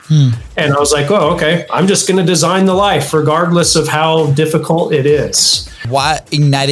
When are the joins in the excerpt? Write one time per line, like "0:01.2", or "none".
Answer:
0:05.8